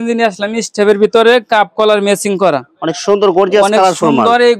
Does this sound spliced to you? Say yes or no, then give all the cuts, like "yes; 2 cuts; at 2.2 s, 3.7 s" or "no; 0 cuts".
no; 0 cuts